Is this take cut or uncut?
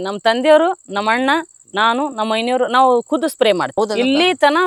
uncut